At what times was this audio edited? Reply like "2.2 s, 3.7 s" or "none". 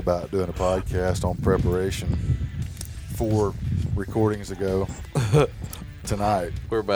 none